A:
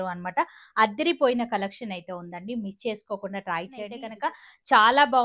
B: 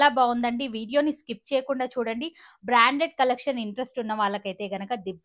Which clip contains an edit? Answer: A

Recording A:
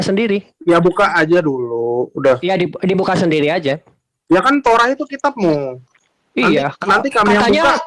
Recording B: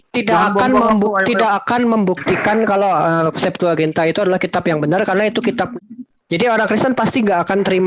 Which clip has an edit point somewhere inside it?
B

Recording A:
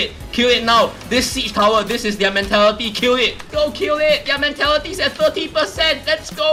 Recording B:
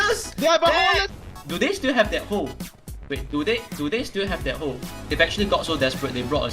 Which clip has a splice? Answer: B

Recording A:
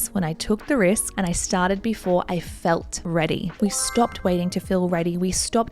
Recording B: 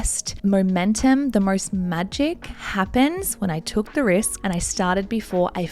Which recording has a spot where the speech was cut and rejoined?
A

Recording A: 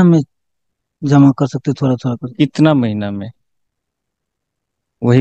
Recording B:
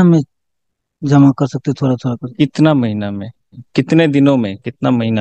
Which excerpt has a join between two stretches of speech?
B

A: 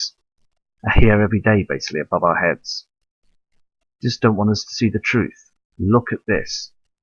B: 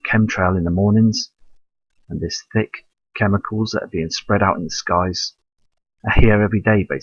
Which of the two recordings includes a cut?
A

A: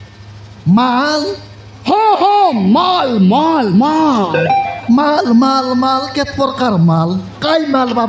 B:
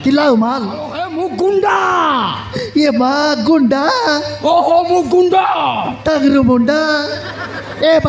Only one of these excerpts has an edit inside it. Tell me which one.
B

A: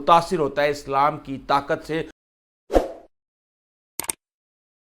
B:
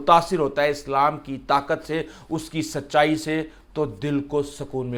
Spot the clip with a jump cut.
A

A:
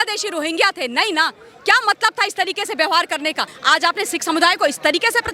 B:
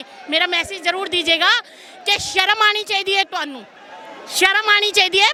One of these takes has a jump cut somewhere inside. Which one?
A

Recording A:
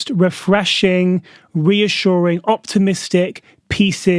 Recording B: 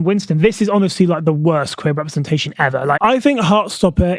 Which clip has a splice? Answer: B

